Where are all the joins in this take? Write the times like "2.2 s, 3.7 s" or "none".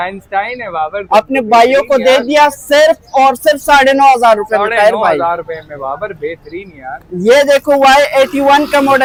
none